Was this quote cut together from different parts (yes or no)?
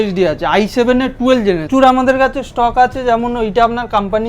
yes